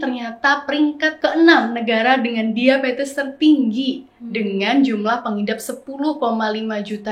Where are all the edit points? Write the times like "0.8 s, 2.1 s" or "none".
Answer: 1.1 s